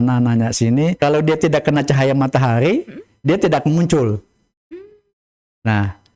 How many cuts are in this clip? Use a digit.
1